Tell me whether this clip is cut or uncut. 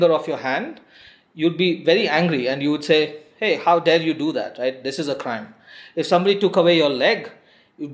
uncut